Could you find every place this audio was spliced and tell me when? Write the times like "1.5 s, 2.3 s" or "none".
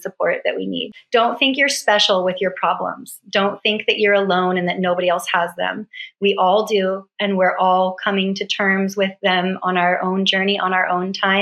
1.0 s

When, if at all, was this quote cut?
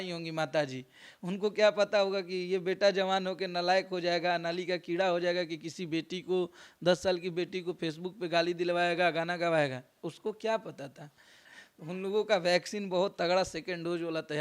11.5 s

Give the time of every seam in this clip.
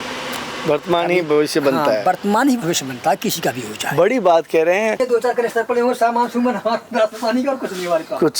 5.0 s

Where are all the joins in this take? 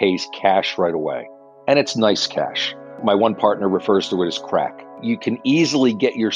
3.0 s, 5.0 s

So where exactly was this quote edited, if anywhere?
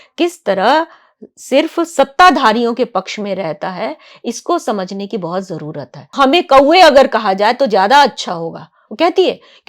6.1 s

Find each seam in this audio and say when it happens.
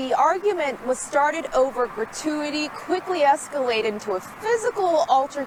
none

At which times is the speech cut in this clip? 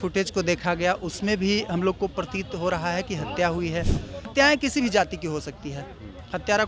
4.3 s

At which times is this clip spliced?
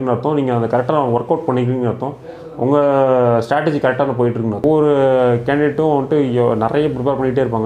4.6 s

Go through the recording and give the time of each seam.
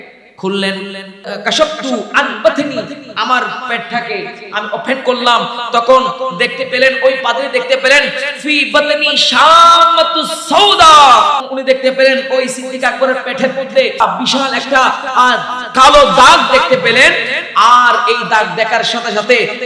1.3 s, 11.4 s, 14.0 s

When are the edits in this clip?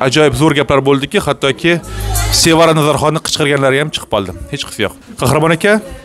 none

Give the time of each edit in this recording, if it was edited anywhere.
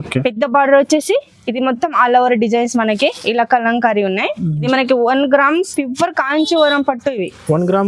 4.6 s

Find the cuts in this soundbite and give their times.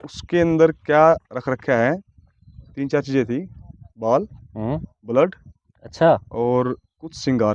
none

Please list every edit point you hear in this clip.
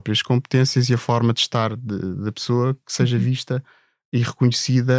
none

